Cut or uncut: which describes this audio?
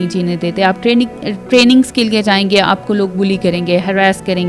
uncut